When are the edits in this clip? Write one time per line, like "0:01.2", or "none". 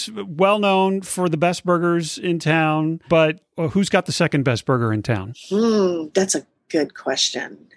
0:03.3